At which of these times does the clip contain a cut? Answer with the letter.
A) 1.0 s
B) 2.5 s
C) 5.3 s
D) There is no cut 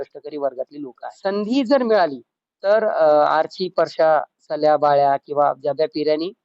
A